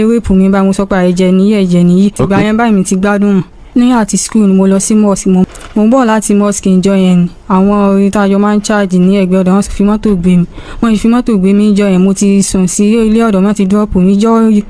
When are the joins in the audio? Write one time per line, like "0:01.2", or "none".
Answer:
0:02.2
0:03.6
0:05.4